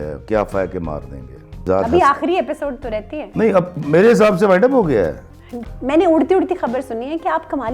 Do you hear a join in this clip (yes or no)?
yes